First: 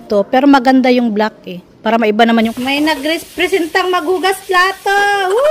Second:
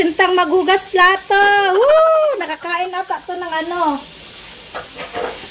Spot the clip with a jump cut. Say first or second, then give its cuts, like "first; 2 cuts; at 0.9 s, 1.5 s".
first; 1 cut; at 2.5 s